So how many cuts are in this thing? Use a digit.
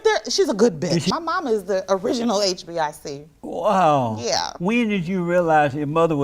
1